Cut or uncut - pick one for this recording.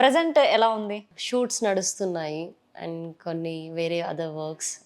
cut